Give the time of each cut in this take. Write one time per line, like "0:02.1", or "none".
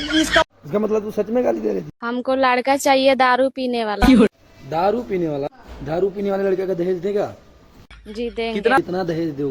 0:02.0